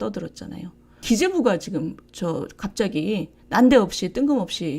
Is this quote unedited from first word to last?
no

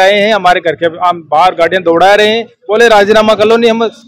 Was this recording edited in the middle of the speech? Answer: no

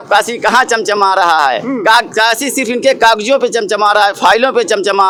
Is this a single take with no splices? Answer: yes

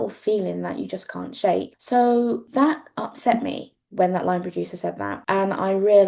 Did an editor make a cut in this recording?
yes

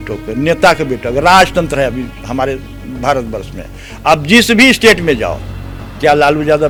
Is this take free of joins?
yes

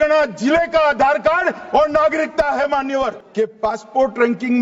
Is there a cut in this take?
yes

